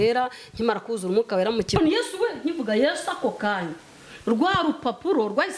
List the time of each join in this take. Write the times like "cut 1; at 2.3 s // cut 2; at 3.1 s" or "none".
cut 1; at 1.8 s